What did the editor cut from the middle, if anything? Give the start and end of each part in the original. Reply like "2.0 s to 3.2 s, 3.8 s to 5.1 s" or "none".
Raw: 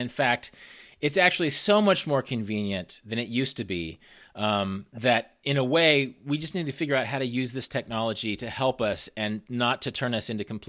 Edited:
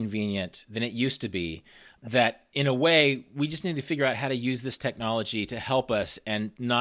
4.3 s to 4.8 s